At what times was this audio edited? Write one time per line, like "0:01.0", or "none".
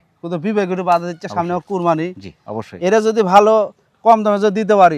none